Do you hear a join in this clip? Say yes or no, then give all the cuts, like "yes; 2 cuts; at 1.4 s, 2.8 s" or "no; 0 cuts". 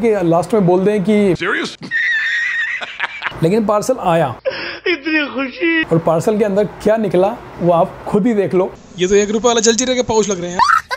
yes; 3 cuts; at 3.2 s, 5.9 s, 8.7 s